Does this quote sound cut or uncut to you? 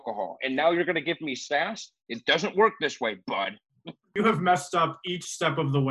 cut